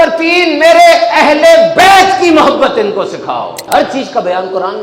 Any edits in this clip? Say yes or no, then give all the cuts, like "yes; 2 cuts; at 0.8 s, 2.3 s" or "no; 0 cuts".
yes; 1 cut; at 3.7 s